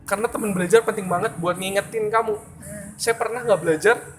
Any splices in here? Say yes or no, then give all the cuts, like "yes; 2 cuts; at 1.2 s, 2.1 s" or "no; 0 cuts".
no; 0 cuts